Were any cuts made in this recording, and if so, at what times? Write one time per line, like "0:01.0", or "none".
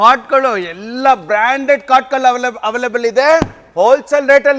none